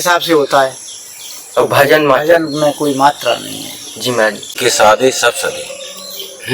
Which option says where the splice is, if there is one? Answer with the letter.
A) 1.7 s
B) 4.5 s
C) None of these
B